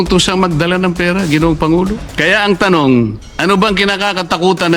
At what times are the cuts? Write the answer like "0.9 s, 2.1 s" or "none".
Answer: 2.1 s, 3.2 s